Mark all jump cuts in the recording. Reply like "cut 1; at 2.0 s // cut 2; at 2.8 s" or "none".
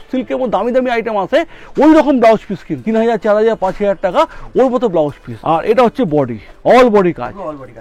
cut 1; at 2.7 s // cut 2; at 5.3 s // cut 3; at 6.4 s